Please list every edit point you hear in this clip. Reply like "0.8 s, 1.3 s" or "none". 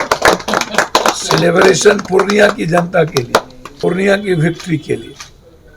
3.6 s